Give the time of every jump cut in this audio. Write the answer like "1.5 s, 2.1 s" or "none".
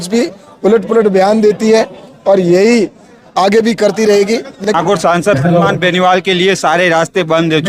4.6 s